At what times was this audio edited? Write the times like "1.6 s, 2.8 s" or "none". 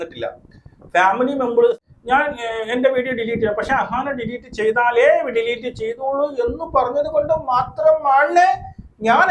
1.8 s